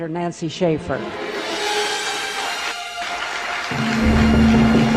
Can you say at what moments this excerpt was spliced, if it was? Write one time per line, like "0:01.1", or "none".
0:02.4